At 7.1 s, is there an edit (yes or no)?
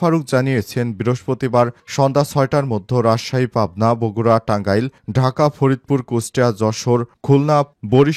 no